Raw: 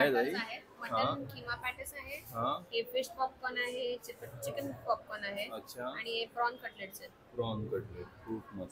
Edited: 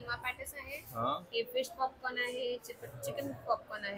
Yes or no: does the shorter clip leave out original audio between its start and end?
no